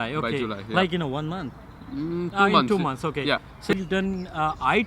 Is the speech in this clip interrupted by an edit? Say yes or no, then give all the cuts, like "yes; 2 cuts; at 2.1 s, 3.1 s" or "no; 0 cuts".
yes; 1 cut; at 3.7 s